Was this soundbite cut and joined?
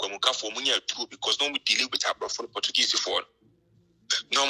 no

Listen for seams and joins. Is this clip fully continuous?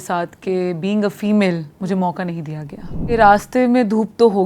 no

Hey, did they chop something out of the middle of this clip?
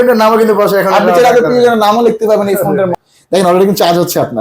yes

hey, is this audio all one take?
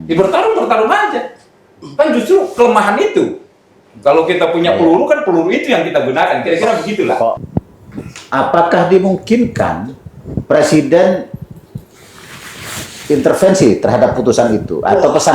no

